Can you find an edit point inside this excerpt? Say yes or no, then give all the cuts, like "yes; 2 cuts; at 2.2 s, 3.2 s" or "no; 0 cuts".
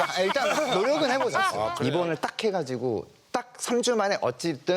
yes; 1 cut; at 1.8 s